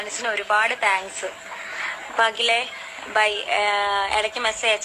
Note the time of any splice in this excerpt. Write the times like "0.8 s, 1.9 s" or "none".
none